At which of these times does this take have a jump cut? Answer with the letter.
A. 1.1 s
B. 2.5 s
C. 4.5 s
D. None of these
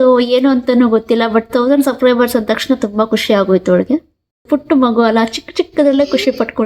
C